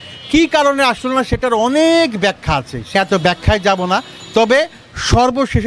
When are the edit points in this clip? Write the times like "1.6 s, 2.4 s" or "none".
2.9 s